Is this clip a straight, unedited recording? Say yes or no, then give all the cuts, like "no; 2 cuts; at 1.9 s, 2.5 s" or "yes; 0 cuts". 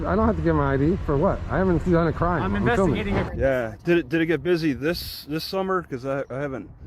no; 1 cut; at 3.2 s